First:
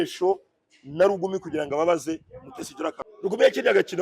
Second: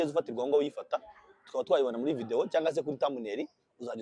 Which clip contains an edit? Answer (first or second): first